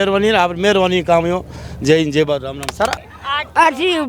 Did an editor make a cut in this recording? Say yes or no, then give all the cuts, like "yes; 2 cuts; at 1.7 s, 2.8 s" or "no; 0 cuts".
no; 0 cuts